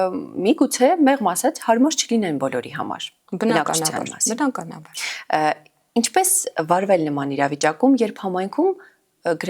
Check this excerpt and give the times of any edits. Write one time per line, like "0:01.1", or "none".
none